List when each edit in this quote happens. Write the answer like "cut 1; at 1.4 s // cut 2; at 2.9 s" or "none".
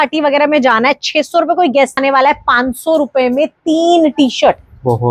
cut 1; at 2.0 s